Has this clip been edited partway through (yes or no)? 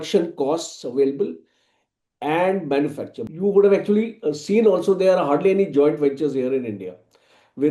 yes